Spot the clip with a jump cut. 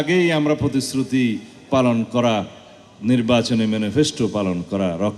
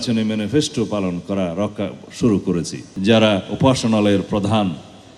second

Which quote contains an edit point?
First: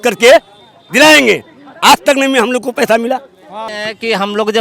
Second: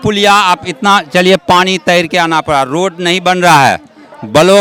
first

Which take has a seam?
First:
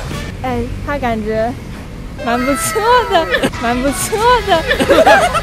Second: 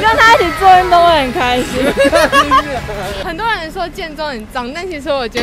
second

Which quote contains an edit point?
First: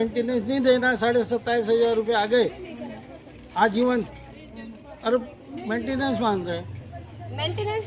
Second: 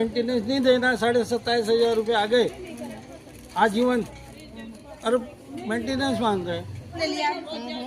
second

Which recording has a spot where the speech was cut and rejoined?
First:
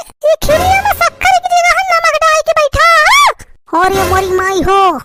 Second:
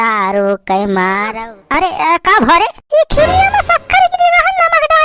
second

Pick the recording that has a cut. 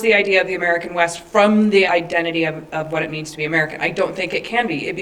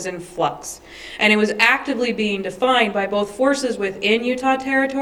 first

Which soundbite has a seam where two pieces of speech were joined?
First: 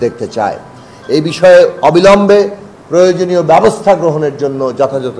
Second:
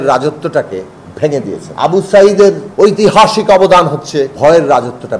second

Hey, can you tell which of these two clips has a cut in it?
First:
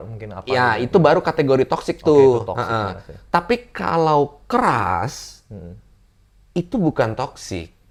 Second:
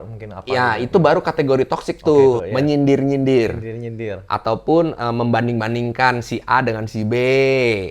second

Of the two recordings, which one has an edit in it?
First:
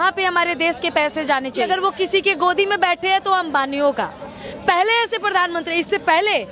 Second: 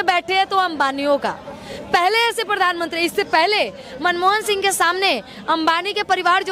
first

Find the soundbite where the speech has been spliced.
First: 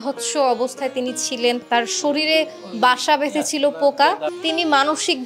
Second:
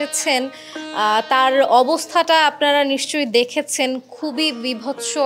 first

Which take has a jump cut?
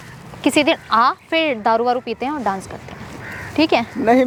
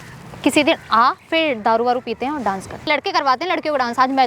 second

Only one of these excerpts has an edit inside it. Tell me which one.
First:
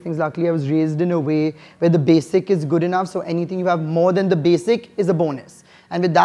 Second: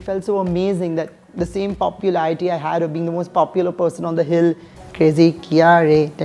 second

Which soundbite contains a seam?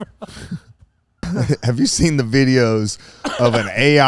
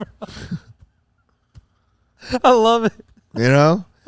first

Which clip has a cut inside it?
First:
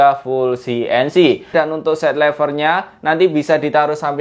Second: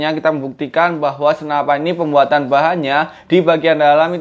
first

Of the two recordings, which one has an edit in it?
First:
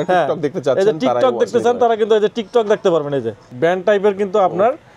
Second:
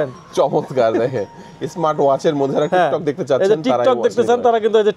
first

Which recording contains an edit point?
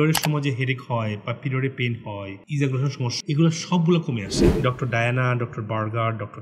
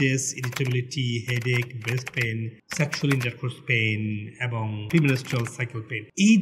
first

